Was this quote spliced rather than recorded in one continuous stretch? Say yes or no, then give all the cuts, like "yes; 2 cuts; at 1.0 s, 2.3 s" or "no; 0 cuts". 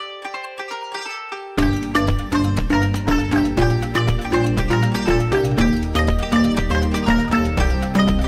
no; 0 cuts